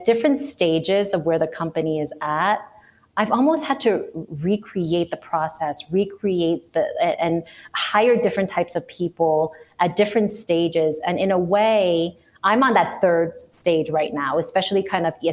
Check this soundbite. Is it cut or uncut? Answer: uncut